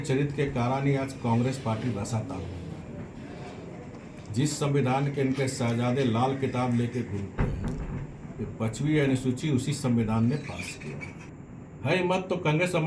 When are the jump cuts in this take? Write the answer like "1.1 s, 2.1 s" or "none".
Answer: 11.2 s